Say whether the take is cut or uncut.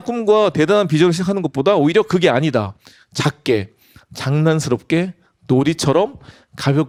uncut